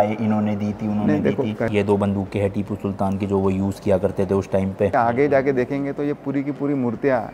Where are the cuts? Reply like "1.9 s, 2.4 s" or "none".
1.7 s, 4.9 s